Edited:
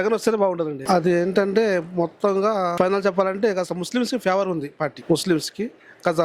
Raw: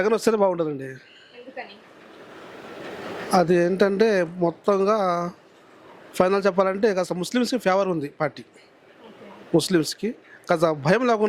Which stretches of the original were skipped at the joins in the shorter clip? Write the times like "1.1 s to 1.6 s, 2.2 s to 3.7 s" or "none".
0.8 s to 3.2 s, 5.2 s to 6.1 s, 8.4 s to 9.4 s